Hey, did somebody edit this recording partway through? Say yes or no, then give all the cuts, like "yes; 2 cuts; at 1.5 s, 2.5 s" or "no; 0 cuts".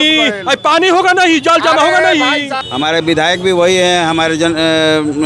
yes; 1 cut; at 2.5 s